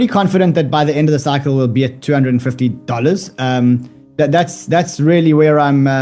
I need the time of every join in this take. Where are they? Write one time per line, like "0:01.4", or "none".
none